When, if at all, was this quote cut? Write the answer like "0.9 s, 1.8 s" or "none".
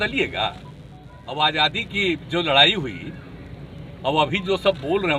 1.4 s

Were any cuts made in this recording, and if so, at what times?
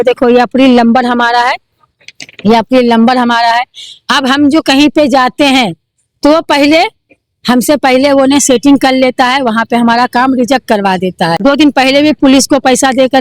11.4 s

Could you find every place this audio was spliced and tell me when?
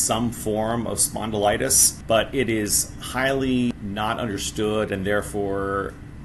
none

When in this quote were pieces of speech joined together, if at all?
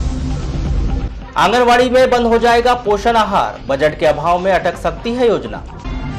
1.1 s

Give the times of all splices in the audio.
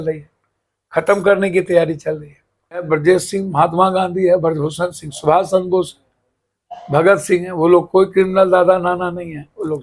2.8 s

